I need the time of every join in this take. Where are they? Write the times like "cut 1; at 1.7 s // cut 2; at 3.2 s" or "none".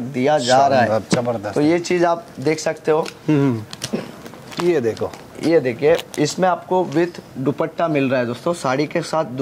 none